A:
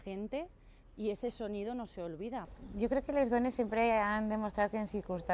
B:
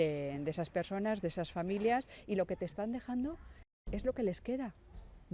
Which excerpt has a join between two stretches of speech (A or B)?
A